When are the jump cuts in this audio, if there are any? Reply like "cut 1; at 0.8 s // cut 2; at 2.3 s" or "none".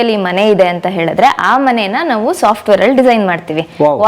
none